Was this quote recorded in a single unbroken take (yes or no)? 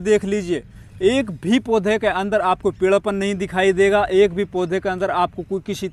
yes